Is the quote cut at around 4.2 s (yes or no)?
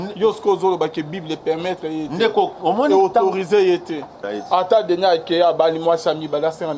yes